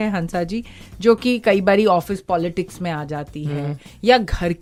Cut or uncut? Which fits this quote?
uncut